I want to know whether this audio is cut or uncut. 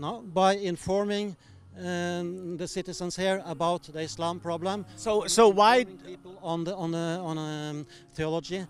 uncut